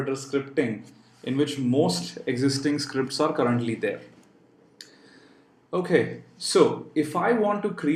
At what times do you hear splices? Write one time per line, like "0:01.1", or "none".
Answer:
none